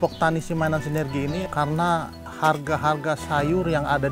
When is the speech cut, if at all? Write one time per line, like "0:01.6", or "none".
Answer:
0:01.5